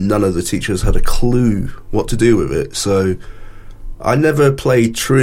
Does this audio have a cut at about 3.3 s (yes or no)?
no